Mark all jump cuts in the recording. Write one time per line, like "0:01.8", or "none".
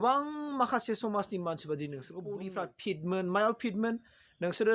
0:02.4